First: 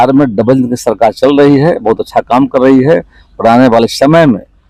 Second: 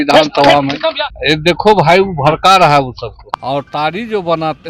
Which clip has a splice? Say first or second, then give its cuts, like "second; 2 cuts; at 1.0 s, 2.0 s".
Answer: second; 2 cuts; at 1.1 s, 3.3 s